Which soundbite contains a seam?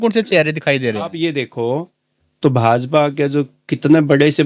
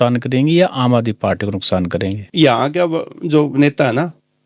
second; 1 cut; at 2.3 s

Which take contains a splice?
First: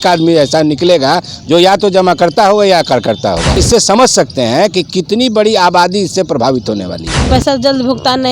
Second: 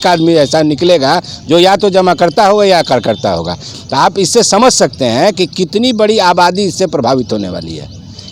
first; 2 cuts; at 3.6 s, 7.3 s

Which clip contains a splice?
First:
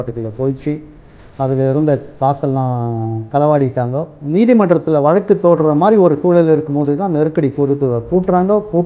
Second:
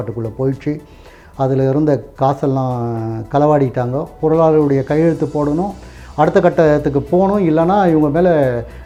first; 1 cut; at 4.0 s

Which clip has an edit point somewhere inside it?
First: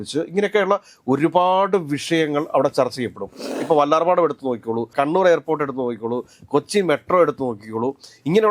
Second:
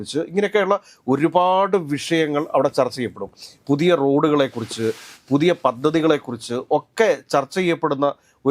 first; 2 cuts; at 3.5 s, 4.9 s

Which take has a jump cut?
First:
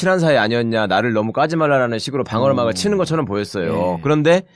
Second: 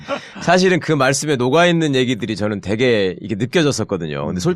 second; 1 cut; at 1.7 s

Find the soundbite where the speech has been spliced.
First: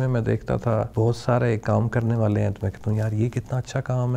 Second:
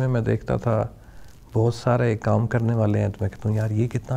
first; 1 cut; at 0.9 s

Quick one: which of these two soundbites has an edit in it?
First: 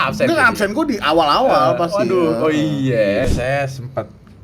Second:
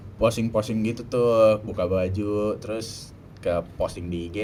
first; 1 cut; at 3.3 s

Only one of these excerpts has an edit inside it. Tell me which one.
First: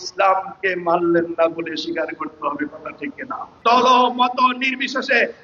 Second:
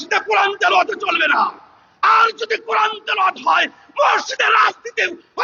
first; 1 cut; at 3.5 s

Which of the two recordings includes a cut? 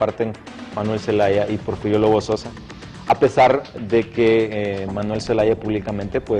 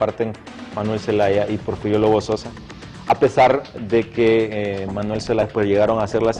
first; 1 cut; at 5.4 s

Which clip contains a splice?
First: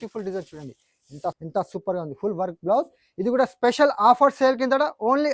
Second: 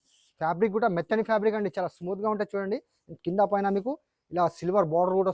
first; 1 cut; at 1.4 s

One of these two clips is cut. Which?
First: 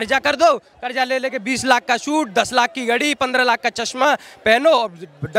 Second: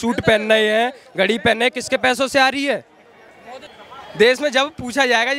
second; 1 cut; at 3.8 s

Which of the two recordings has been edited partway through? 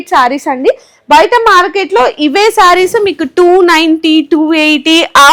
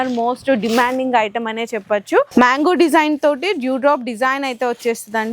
second; 1 cut; at 2.3 s

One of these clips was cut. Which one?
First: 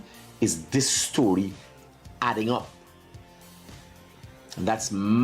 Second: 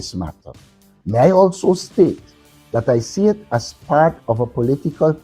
first; 2 cuts; at 2.7 s, 4.5 s

